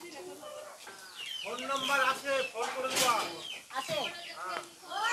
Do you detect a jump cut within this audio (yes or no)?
yes